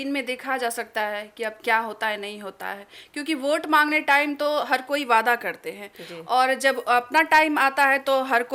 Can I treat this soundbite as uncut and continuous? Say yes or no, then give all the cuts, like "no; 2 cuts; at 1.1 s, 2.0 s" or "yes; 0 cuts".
yes; 0 cuts